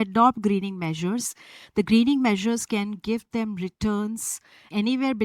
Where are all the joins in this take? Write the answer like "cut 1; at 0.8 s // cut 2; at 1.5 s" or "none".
none